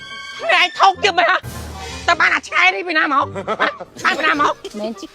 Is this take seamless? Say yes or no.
yes